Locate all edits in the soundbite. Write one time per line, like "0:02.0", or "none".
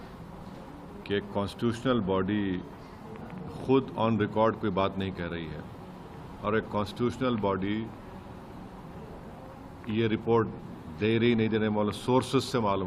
none